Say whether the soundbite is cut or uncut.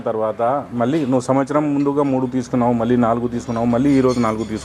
uncut